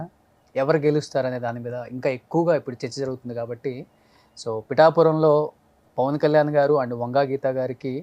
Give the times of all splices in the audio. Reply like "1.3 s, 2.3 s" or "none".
none